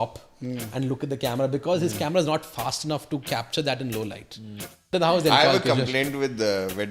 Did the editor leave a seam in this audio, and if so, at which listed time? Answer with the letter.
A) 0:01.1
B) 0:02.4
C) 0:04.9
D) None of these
C